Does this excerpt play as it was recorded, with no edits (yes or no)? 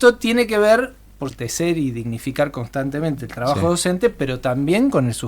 no